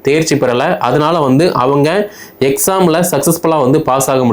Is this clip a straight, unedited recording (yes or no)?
yes